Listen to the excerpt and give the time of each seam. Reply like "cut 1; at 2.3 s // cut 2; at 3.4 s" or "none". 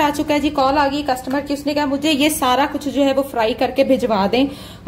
none